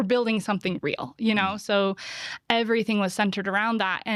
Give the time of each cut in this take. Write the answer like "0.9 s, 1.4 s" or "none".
none